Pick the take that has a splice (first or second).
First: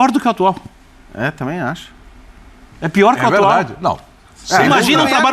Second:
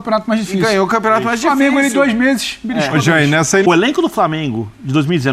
second